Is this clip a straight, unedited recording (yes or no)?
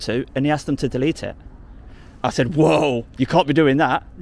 no